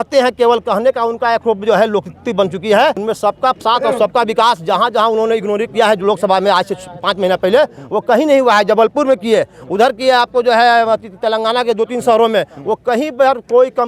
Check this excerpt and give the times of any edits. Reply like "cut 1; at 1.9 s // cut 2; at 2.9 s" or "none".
cut 1; at 3.0 s